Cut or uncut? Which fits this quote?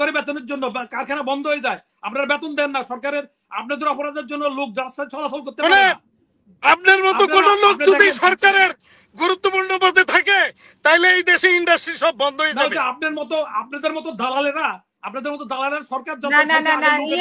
uncut